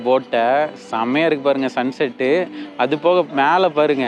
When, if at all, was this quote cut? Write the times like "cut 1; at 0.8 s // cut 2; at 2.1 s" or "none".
none